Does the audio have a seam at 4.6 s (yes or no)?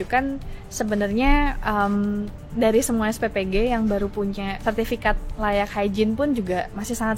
yes